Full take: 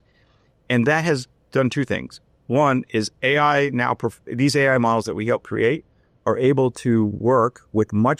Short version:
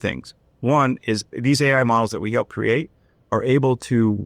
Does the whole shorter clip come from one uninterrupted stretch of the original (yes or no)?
no